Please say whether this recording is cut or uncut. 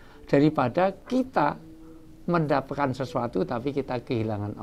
cut